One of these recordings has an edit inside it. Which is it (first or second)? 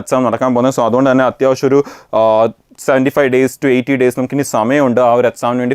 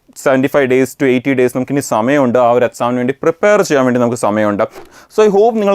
second